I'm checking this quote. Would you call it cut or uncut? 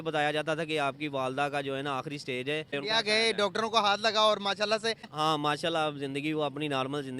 cut